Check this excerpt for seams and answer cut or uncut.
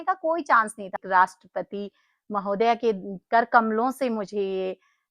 cut